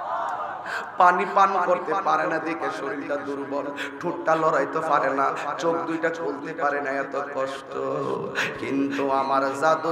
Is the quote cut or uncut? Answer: uncut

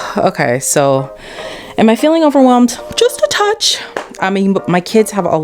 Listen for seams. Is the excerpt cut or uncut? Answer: uncut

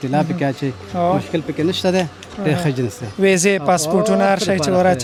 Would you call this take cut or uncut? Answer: uncut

